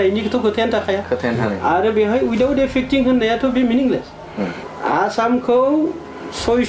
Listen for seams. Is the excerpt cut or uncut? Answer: cut